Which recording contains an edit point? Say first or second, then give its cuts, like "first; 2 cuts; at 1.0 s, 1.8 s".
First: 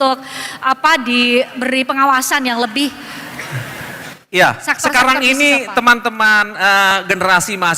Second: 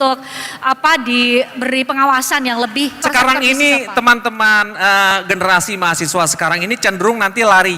second; 1 cut; at 3.0 s